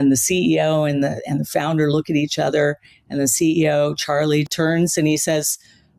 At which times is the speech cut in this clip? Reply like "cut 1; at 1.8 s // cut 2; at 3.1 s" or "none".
cut 1; at 4.5 s